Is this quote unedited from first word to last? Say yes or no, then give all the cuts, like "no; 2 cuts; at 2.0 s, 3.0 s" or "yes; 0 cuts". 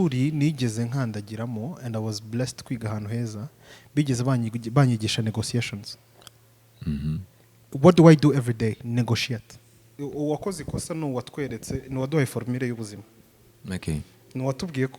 no; 1 cut; at 9.9 s